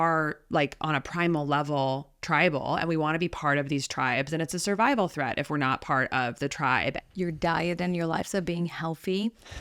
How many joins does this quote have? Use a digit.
1